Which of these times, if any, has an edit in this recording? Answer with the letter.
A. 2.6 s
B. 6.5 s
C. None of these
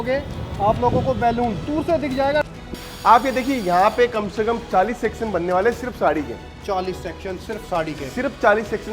A